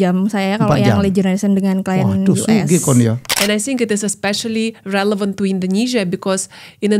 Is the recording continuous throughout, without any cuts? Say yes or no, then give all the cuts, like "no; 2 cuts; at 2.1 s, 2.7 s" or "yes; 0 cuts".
no; 1 cut; at 3.3 s